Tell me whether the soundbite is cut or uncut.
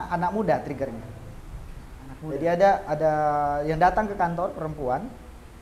uncut